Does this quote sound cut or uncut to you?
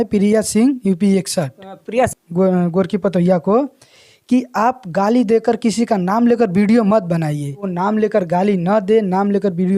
cut